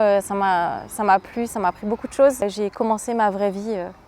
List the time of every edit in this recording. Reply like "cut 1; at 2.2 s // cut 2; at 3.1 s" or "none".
cut 1; at 2.4 s